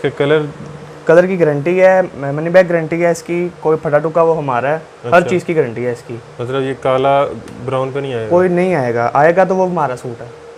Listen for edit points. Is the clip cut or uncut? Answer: uncut